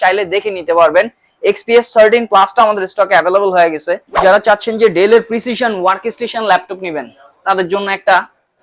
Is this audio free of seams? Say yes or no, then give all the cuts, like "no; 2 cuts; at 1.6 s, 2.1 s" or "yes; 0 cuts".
no; 1 cut; at 4.1 s